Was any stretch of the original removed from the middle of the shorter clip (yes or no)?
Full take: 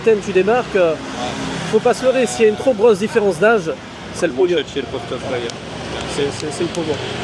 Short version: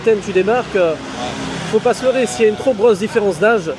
no